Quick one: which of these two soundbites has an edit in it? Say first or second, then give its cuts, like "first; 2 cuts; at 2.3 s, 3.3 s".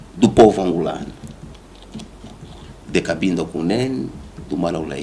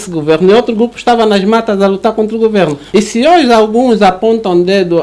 second; 1 cut; at 2.8 s